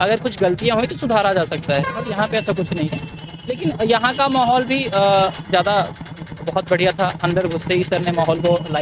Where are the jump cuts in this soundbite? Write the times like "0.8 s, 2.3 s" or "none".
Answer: none